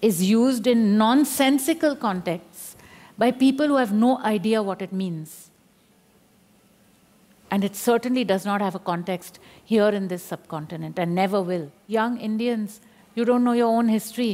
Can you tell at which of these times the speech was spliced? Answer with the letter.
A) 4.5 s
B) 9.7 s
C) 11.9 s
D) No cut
C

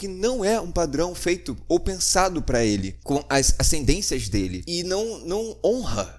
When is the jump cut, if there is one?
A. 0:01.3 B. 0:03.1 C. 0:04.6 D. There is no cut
C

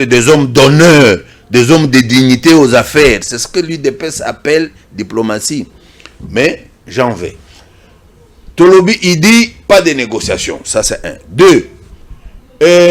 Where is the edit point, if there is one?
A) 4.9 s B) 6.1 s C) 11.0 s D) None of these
D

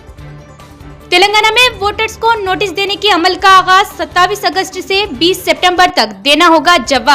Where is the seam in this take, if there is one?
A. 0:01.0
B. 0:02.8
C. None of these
A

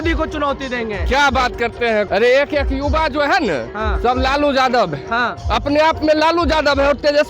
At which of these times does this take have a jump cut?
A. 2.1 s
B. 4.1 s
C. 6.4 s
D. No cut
A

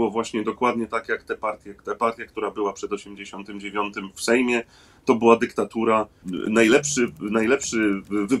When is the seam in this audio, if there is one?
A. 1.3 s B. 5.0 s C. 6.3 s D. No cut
C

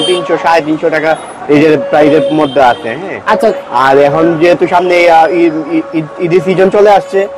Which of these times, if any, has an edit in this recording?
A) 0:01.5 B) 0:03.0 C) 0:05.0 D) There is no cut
D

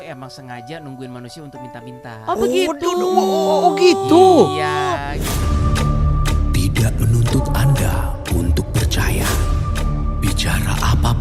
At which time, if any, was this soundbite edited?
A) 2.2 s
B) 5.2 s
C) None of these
B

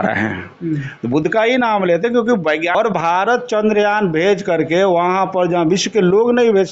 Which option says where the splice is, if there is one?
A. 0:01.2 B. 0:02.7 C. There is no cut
B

